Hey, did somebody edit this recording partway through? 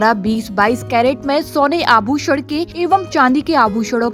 yes; 1 cut; at 2.7 s

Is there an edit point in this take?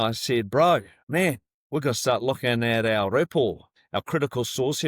yes; 2 cuts; at 1.0 s, 3.7 s

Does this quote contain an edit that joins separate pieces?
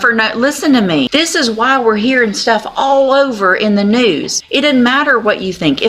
yes; 2 cuts; at 1.1 s, 4.3 s

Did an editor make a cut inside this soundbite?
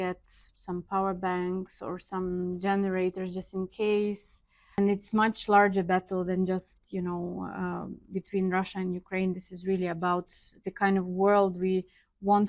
yes; 1 cut; at 4.8 s

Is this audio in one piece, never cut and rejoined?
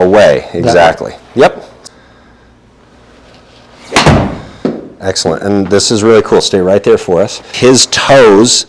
no; 2 cuts; at 1.7 s, 7.5 s

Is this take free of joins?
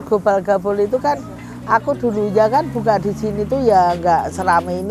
yes; 0 cuts

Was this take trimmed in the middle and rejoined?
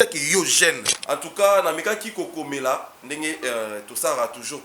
yes; 1 cut; at 0.9 s

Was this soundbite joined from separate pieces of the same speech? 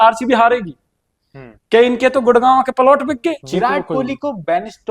yes; 1 cut; at 3.4 s

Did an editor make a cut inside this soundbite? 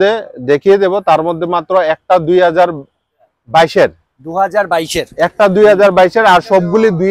no; 0 cuts

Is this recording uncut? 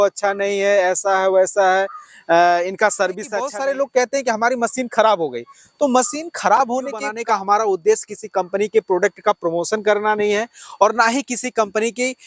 no; 2 cuts; at 3.5 s, 7.1 s

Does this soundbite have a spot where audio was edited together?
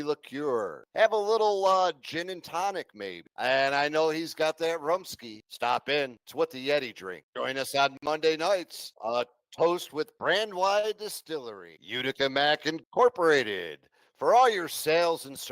yes; 1 cut; at 9.8 s

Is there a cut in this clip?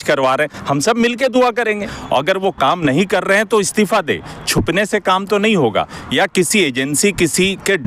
yes; 1 cut; at 1.7 s

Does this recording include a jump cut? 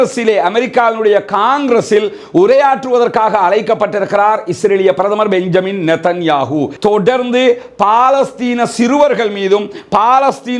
yes; 1 cut; at 6.7 s

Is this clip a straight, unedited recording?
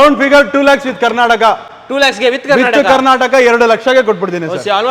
yes; 0 cuts

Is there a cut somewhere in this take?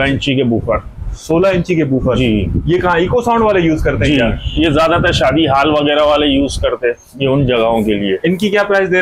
no; 0 cuts

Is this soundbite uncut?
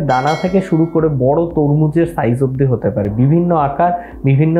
yes; 0 cuts

